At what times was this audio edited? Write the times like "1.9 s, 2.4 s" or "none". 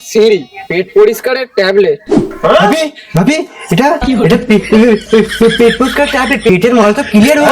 6.5 s